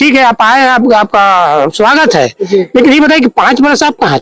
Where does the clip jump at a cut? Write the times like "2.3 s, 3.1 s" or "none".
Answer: none